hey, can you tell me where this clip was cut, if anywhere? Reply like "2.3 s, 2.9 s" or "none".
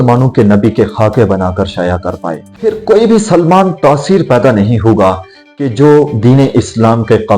2.5 s